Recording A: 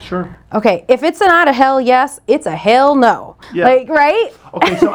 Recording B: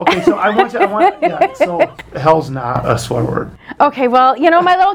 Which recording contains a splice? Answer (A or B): B